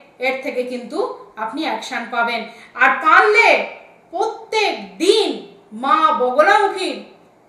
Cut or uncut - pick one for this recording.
uncut